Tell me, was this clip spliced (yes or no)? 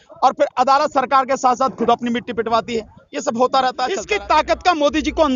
yes